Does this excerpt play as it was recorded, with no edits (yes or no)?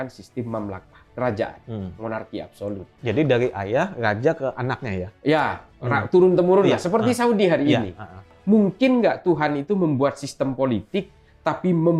no